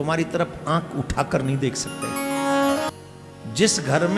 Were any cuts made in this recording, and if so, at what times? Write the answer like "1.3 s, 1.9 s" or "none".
2.9 s